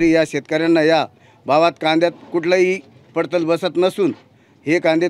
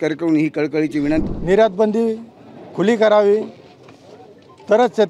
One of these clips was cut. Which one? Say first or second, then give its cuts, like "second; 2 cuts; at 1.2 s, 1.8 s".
second; 1 cut; at 1.2 s